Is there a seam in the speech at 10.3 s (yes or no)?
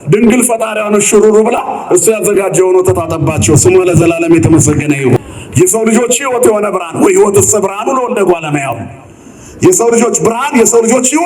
no